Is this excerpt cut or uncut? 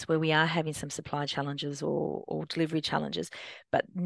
uncut